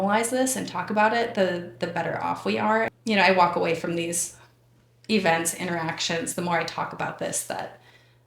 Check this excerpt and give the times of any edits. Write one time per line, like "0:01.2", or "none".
0:02.9